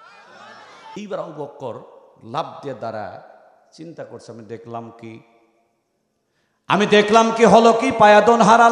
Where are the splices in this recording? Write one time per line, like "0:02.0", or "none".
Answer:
0:01.0